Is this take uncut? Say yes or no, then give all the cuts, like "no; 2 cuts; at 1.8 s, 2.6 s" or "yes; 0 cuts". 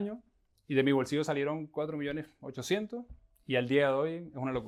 yes; 0 cuts